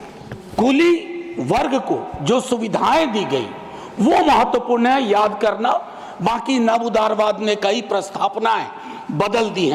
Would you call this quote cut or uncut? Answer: uncut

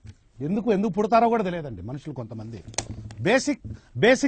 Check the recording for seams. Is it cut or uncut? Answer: uncut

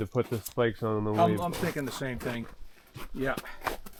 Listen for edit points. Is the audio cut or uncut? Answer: uncut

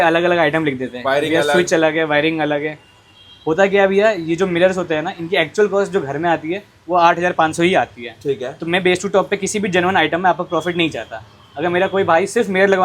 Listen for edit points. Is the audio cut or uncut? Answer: uncut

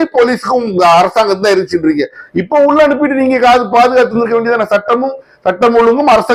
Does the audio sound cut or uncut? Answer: uncut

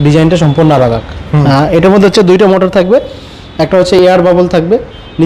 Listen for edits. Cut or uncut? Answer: uncut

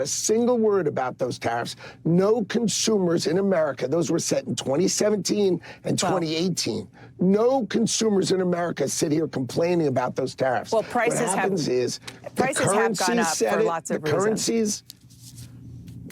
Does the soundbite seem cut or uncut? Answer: uncut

